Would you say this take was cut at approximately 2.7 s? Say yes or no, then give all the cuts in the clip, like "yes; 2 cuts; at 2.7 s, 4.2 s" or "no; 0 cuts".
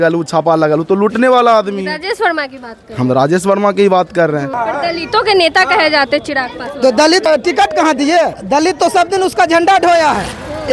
no; 3 cuts; at 4.5 s, 7.3 s, 8.4 s